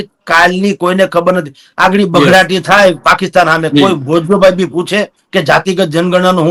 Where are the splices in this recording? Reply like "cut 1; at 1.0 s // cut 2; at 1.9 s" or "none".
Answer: none